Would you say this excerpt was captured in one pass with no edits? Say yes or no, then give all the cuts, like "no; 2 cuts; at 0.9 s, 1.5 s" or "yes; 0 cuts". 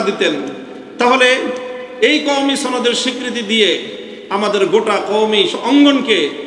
yes; 0 cuts